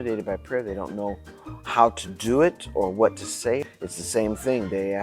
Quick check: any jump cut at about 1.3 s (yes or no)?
no